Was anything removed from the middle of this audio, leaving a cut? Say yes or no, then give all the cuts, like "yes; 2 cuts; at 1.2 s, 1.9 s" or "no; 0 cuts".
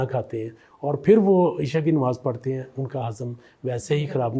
no; 0 cuts